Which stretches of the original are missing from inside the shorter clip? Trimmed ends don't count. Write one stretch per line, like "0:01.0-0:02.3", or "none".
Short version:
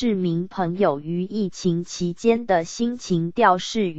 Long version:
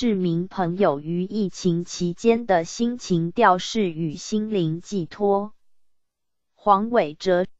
none